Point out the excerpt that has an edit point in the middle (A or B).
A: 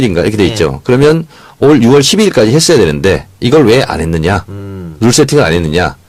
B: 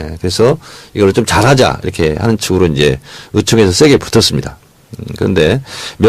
B